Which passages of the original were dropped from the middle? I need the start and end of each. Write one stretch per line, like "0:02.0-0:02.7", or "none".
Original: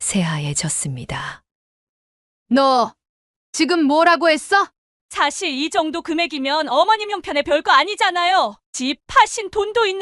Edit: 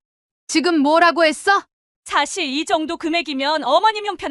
none